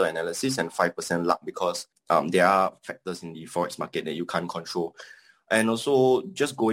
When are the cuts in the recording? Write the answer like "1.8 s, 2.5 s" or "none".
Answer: 1.9 s